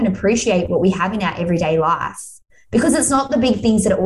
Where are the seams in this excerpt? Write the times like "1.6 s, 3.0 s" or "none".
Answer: none